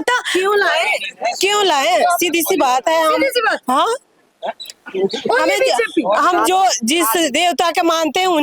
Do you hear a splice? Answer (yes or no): no